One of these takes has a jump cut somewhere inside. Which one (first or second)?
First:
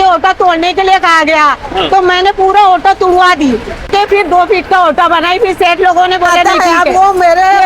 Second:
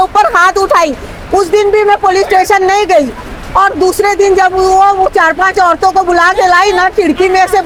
first